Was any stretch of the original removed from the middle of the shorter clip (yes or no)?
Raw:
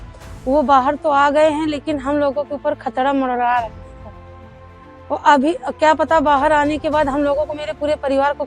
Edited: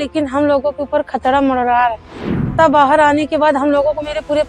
yes